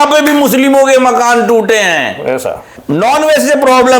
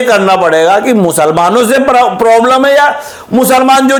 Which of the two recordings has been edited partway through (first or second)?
first